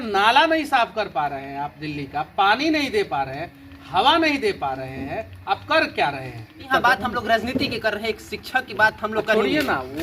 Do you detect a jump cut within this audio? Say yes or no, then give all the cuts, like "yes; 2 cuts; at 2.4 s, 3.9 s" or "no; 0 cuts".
yes; 1 cut; at 6.7 s